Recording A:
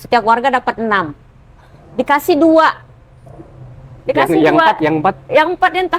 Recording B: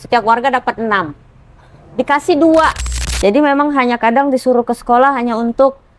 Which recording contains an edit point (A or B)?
B